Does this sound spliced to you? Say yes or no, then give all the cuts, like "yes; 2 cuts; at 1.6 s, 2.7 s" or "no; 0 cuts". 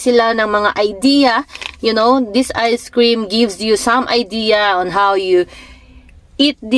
no; 0 cuts